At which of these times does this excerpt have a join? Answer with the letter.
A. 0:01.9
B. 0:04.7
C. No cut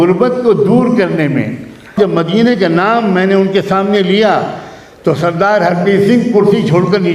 A